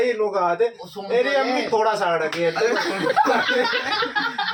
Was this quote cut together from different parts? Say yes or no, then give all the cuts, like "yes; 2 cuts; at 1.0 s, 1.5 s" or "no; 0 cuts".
no; 0 cuts